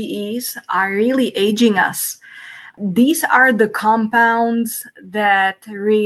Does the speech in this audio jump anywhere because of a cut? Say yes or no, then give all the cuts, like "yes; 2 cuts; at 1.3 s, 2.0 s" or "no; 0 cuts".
yes; 1 cut; at 2.7 s